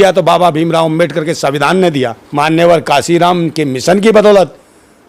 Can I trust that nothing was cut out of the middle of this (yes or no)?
no